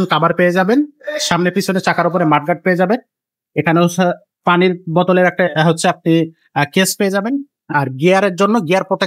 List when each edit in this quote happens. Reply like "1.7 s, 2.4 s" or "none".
none